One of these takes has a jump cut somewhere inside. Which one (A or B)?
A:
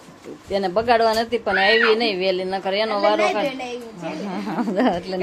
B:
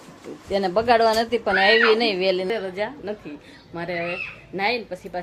B